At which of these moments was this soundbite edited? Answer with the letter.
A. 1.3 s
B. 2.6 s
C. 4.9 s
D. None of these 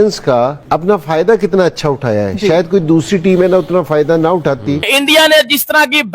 C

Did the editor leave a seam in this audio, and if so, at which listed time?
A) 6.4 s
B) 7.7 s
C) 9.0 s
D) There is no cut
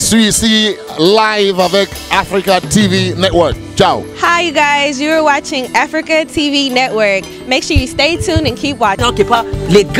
C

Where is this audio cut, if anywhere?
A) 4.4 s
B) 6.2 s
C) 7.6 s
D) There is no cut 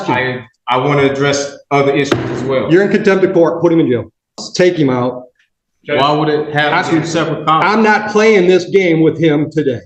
A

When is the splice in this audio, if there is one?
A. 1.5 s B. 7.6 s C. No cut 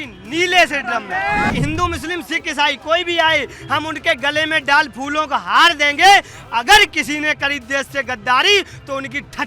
A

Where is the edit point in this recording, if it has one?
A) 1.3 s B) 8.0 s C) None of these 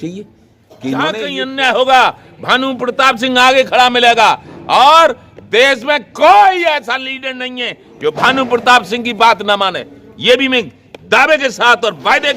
A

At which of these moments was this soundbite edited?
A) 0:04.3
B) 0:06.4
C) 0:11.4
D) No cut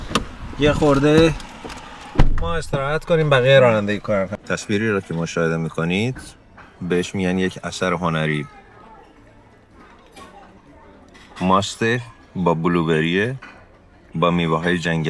A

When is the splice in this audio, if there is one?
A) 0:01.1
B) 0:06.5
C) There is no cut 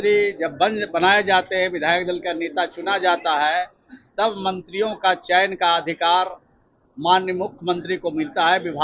C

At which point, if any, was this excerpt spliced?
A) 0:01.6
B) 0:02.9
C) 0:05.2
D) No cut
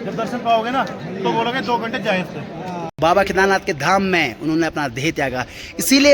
B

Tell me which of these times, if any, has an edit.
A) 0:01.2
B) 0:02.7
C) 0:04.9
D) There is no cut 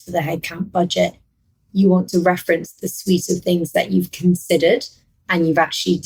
D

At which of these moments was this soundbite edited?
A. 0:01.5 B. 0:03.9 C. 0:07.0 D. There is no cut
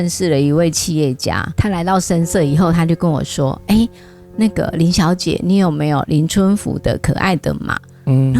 A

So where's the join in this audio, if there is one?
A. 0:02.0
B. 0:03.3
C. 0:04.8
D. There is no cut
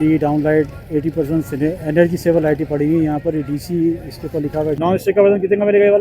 C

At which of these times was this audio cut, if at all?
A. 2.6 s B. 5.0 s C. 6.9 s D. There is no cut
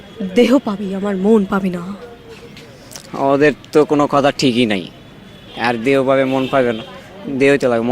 B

